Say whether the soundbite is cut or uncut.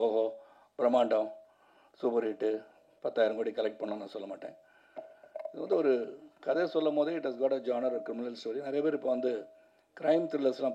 uncut